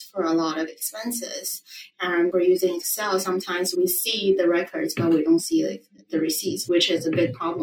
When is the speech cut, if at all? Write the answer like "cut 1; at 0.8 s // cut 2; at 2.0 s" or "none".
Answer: cut 1; at 2.3 s // cut 2; at 6.6 s